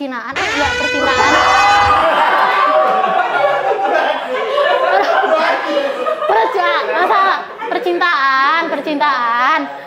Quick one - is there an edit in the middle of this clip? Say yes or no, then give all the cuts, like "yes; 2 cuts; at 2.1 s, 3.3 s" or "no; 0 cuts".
no; 0 cuts